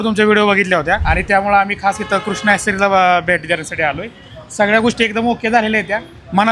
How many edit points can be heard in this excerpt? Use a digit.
0